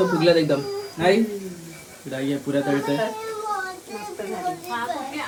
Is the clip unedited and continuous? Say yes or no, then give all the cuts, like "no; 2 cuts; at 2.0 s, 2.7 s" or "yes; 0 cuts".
yes; 0 cuts